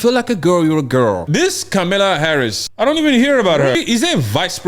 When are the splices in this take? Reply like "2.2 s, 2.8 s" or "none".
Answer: 1.2 s, 2.6 s, 3.8 s